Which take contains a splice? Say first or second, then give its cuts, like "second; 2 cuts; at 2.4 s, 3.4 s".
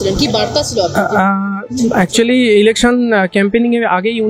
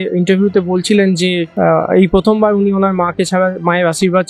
second; 1 cut; at 1.5 s